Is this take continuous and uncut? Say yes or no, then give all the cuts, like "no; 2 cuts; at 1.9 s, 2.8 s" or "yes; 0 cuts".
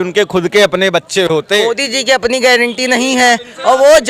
no; 1 cut; at 1.6 s